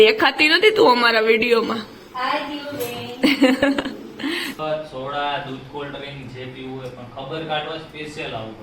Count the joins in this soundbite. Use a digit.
1